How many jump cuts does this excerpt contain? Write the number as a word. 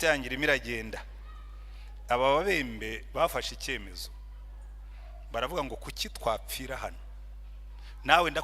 zero